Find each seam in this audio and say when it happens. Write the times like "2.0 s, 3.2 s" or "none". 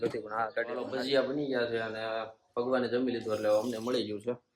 0.9 s